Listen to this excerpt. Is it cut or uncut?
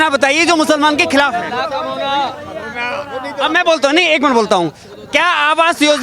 uncut